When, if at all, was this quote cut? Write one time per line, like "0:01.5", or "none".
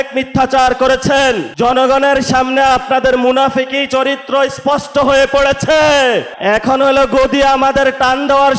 0:01.5
0:06.3